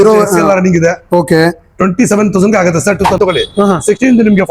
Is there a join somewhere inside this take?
yes; 1 cut; at 3.2 s

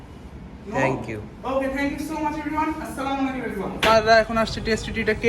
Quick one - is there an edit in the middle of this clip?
yes; 1 cut; at 3.9 s

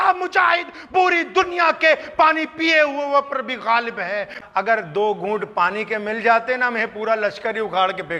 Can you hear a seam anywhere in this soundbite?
yes; 1 cut; at 4.4 s

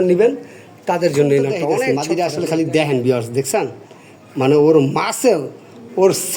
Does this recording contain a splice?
yes; 1 cut; at 1.9 s

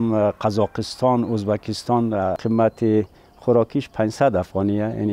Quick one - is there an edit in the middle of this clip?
yes; 1 cut; at 2.4 s

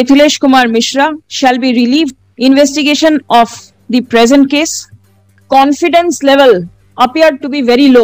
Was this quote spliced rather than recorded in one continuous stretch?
yes; 3 cuts; at 1.2 s, 2.2 s, 5.4 s

